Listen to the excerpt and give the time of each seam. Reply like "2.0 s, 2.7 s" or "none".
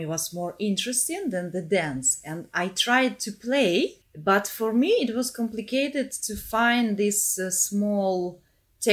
4.1 s